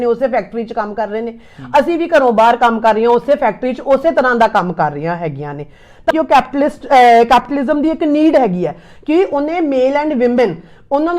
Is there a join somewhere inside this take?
yes; 1 cut; at 6.1 s

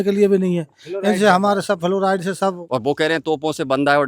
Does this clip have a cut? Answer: yes; 1 cut; at 2.6 s

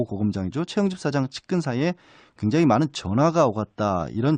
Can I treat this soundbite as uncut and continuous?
yes; 0 cuts

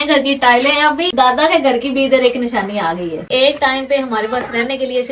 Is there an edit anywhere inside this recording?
yes; 2 cuts; at 1.1 s, 3.3 s

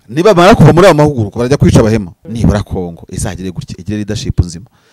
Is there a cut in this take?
yes; 1 cut; at 2.2 s

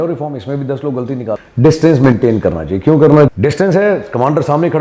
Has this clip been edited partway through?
yes; 2 cuts; at 1.4 s, 3.3 s

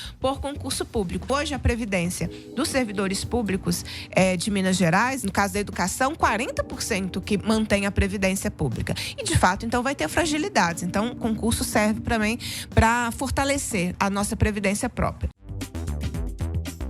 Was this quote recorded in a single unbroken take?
no; 3 cuts; at 1.3 s, 13.9 s, 15.5 s

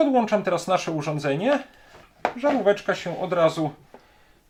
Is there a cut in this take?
no; 0 cuts

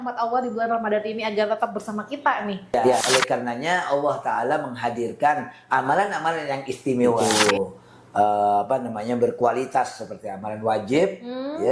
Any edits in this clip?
yes; 2 cuts; at 3.0 s, 7.2 s

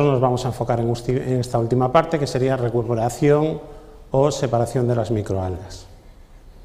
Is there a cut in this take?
yes; 1 cut; at 2.3 s

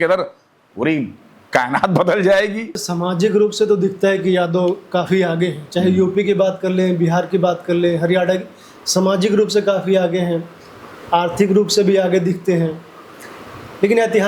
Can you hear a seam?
yes; 1 cut; at 2.9 s

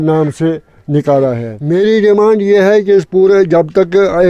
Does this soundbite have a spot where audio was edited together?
yes; 1 cut; at 1.5 s

